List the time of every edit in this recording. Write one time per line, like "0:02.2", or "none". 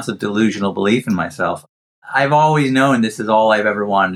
none